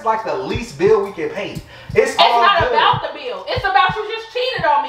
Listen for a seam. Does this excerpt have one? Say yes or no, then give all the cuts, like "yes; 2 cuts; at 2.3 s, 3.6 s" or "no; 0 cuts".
no; 0 cuts